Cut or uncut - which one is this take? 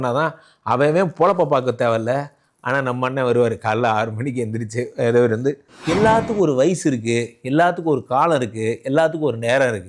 cut